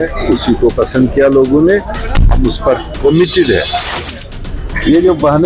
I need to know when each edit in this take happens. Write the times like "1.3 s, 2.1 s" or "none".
4.1 s